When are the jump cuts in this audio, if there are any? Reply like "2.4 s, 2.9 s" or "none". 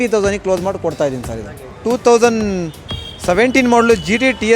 1.8 s